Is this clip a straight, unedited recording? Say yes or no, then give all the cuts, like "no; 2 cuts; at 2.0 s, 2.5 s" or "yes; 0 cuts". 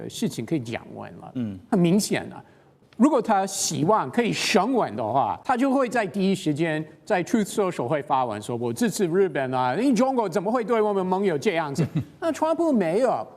no; 1 cut; at 5.4 s